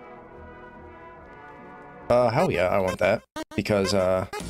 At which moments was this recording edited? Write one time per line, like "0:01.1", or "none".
0:01.9